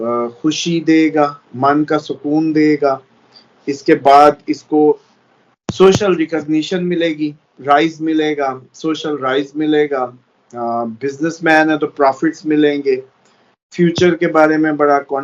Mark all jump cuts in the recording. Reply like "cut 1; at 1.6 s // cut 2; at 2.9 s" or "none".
none